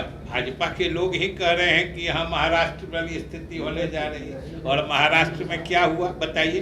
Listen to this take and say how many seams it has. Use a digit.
0